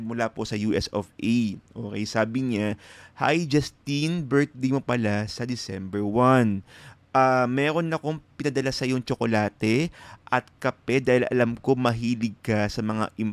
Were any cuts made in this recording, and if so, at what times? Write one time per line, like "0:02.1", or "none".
none